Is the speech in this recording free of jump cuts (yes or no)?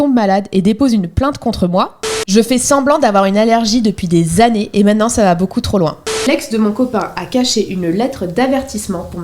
no